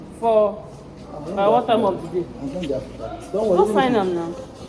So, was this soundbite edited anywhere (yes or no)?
no